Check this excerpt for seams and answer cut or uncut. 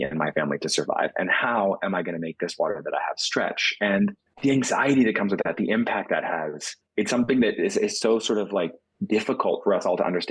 cut